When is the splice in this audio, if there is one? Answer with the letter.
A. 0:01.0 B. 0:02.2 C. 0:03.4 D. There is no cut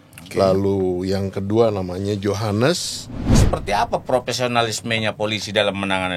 C